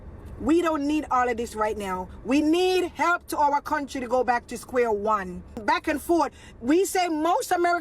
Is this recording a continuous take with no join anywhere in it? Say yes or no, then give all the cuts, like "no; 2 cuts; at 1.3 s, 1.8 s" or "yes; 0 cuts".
no; 1 cut; at 5.6 s